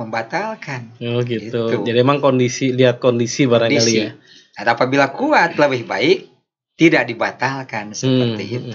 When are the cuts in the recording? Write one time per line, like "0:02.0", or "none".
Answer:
none